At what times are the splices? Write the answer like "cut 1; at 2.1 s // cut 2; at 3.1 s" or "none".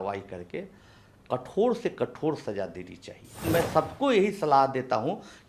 cut 1; at 3.4 s